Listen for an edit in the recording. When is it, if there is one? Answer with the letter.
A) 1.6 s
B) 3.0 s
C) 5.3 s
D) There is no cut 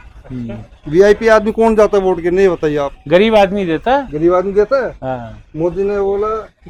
D